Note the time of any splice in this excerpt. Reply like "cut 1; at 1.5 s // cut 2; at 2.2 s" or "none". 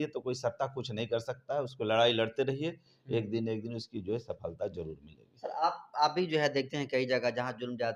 none